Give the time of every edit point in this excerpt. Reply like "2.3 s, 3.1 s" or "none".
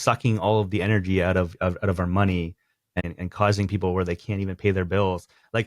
3.0 s